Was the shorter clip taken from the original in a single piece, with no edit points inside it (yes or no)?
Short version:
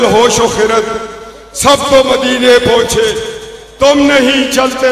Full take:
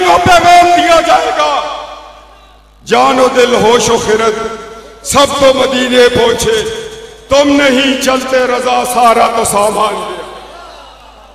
yes